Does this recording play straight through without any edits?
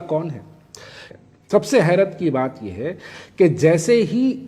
no; 1 cut; at 1.0 s

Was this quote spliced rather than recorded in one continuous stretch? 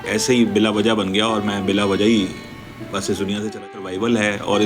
yes; 1 cut; at 3.7 s

